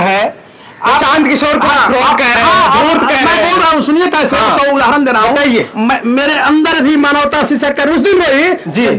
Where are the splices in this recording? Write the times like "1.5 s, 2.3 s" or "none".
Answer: none